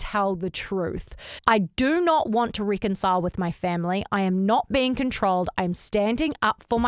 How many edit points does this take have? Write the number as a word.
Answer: one